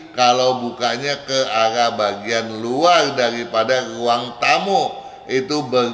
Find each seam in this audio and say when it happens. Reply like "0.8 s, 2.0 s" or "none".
none